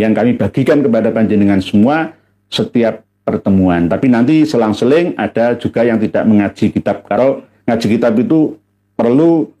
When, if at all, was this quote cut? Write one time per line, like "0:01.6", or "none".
none